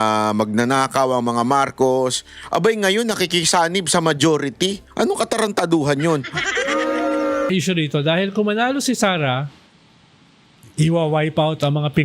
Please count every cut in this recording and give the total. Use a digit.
1